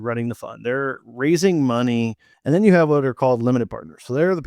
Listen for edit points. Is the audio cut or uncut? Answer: cut